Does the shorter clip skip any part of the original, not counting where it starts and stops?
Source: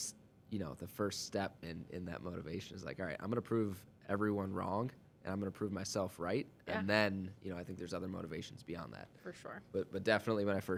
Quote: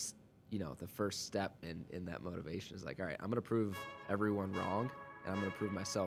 no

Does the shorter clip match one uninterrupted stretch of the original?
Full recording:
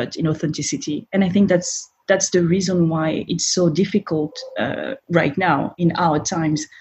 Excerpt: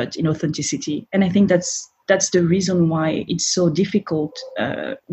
yes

